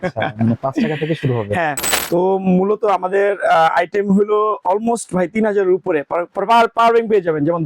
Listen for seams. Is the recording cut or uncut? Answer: cut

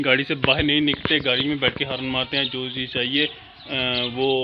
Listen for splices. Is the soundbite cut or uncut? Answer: uncut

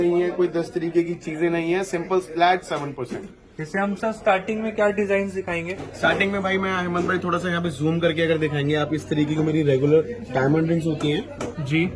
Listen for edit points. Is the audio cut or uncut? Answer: uncut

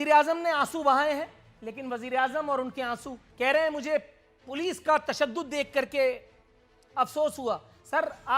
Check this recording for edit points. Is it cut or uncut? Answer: cut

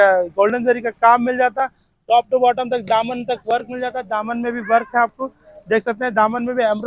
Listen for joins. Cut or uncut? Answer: uncut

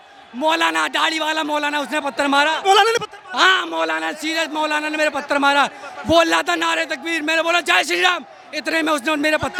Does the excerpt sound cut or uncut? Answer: uncut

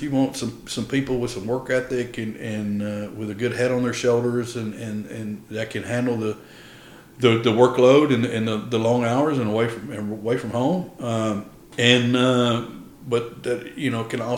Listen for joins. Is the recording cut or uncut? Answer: uncut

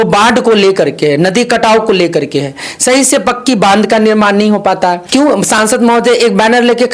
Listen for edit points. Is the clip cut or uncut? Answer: cut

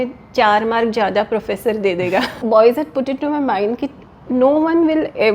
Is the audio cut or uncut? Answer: cut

